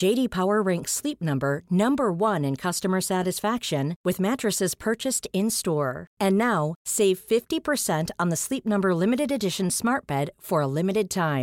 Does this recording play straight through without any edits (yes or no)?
yes